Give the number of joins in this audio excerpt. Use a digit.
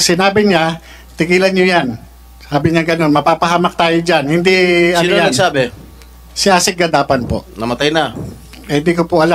0